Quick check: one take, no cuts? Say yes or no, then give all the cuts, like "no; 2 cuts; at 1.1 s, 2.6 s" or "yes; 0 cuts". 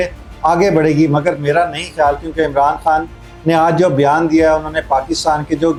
yes; 0 cuts